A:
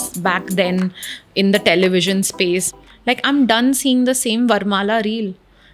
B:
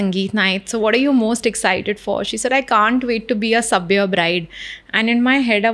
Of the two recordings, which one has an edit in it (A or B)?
A